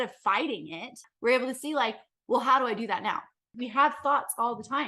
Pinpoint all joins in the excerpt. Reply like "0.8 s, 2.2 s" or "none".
1.0 s, 3.6 s